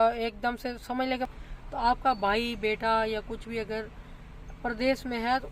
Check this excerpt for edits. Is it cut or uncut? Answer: cut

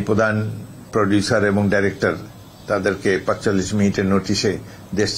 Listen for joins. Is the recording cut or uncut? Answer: uncut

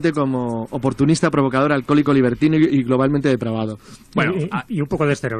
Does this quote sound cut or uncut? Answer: uncut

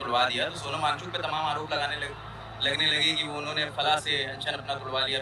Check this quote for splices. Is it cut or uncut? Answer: uncut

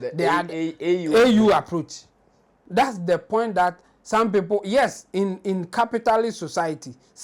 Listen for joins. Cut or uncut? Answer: cut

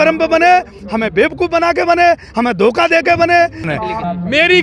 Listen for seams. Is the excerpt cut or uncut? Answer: cut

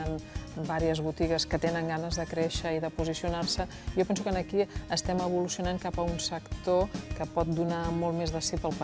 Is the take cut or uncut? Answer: uncut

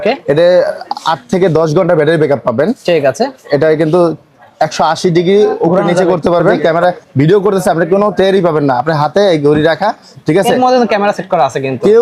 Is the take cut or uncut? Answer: cut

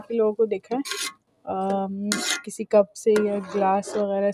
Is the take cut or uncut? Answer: uncut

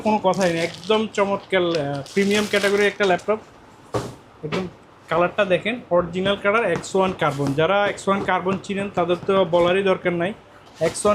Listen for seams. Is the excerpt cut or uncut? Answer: uncut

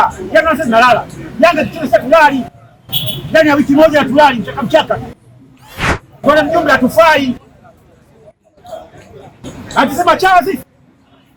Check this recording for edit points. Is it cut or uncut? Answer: uncut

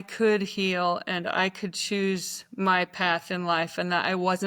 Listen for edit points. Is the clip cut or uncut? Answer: uncut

